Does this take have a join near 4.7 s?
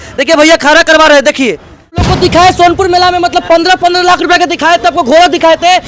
no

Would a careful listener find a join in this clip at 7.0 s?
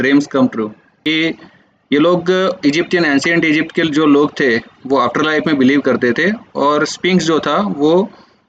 no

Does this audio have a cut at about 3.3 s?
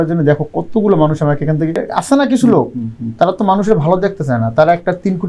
no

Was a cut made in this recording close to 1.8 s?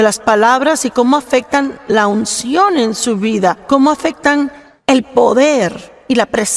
no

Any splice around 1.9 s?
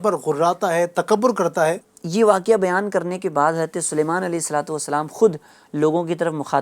yes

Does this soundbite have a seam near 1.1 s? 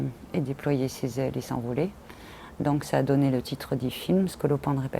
no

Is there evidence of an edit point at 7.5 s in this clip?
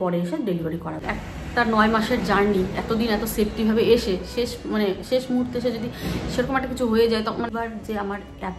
yes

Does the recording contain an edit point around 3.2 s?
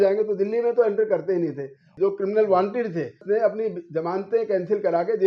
yes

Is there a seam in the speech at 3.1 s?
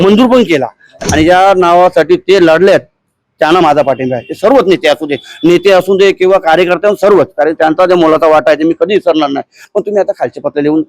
no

